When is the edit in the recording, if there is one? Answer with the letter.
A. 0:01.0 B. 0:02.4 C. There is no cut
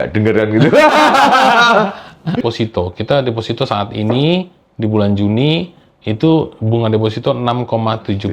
B